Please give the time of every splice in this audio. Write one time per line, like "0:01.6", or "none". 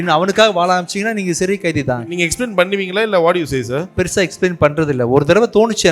0:02.1
0:03.9